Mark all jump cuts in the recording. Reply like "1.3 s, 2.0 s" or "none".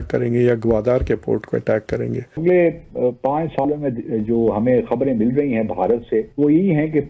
2.4 s